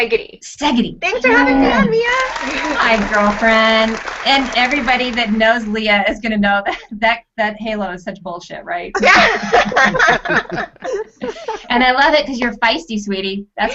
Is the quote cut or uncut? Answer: cut